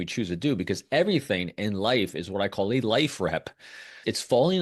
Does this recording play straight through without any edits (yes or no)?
yes